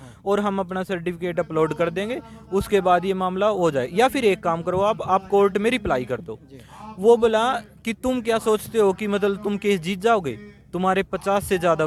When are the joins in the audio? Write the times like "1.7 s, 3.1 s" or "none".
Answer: none